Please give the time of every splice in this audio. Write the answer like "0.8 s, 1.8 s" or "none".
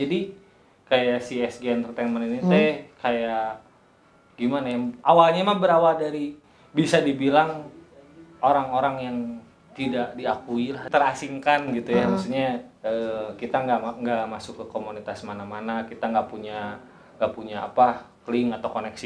10.8 s